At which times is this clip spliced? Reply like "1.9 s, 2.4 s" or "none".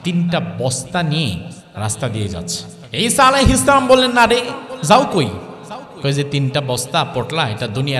1.6 s, 2.7 s